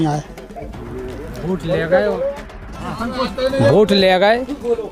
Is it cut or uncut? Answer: cut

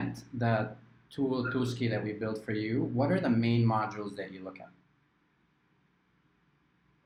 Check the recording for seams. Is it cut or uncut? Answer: uncut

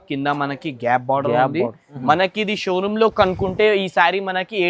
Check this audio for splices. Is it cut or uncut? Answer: cut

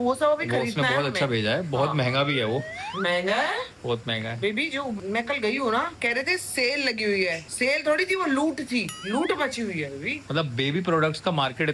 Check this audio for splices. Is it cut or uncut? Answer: cut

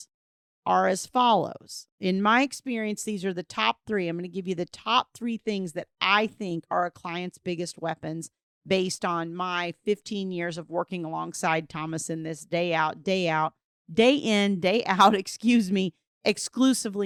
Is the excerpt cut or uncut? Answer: uncut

